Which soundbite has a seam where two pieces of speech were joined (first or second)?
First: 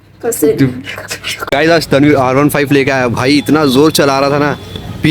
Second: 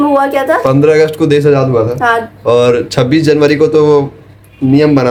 first